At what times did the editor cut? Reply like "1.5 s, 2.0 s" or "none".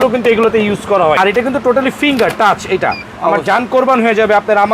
1.2 s, 3.1 s